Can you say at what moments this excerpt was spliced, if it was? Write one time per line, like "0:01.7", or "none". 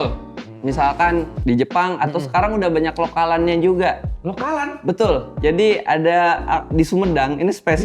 0:01.4
0:05.3